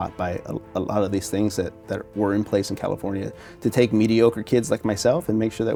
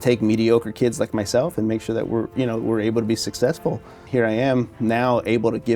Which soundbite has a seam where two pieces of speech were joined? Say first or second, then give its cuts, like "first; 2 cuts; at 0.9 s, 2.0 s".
second; 1 cut; at 4.0 s